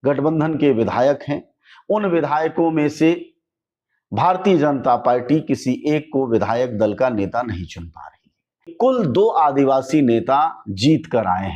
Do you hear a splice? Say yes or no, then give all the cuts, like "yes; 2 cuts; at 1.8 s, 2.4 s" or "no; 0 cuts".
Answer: yes; 1 cut; at 8.7 s